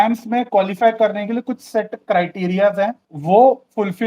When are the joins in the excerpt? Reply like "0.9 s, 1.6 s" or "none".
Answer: 3.1 s